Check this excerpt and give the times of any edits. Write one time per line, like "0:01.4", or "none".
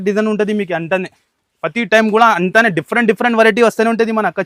none